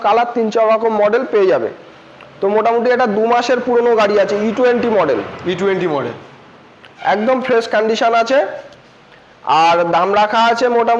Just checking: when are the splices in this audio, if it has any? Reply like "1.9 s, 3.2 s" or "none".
none